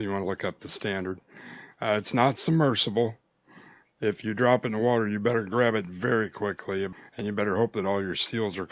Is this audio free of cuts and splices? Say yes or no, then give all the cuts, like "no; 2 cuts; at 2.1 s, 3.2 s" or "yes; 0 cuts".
no; 1 cut; at 6.9 s